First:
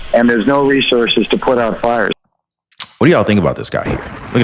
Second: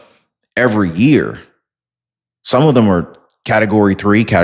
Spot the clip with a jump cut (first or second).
first